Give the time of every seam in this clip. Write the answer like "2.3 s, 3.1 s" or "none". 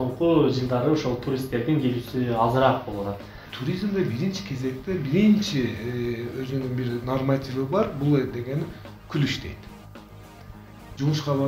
3.5 s